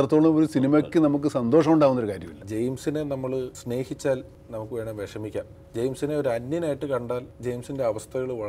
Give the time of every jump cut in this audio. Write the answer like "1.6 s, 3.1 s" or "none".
2.4 s, 3.6 s, 4.4 s, 5.6 s